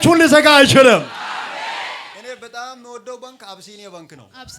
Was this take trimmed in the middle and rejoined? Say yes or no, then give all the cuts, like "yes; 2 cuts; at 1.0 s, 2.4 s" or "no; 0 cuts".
yes; 1 cut; at 2.1 s